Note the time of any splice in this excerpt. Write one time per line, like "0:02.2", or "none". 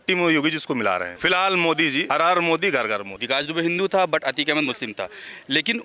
0:01.1
0:02.0
0:03.1